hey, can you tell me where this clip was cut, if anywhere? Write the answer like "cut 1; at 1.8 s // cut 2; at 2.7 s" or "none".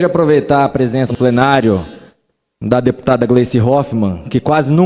cut 1; at 1.1 s